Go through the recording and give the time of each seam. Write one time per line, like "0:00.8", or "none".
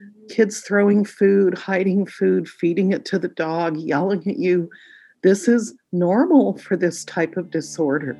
none